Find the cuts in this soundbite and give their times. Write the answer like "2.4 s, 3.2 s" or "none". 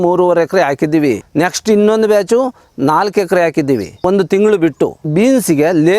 1.2 s, 4.0 s, 5.1 s